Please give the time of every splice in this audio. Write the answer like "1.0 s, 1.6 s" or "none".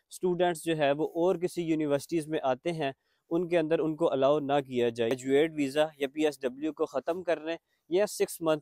5.1 s